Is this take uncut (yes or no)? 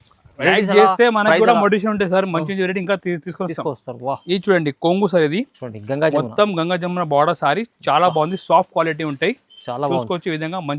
yes